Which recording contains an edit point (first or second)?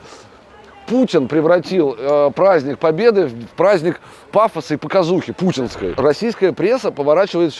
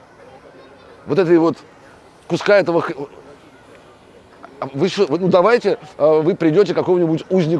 first